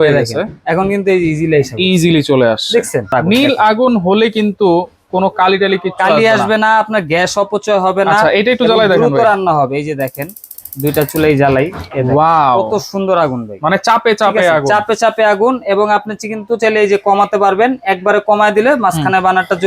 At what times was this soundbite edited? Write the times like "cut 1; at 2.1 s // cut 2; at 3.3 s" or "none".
cut 1; at 3.1 s